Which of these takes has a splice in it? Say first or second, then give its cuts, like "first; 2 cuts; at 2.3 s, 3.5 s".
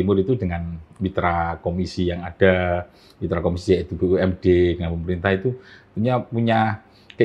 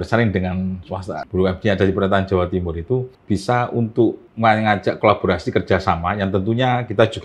second; 3 cuts; at 1.2 s, 3.1 s, 4.3 s